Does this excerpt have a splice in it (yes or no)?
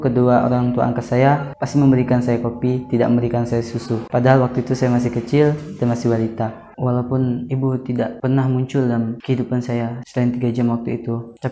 yes